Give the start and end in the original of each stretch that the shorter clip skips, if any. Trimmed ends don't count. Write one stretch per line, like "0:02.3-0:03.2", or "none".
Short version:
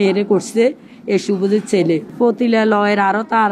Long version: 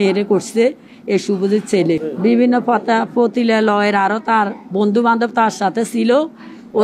0:02.1-0:03.1